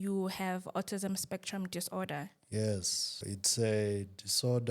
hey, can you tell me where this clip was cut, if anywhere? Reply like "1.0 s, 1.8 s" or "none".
3.2 s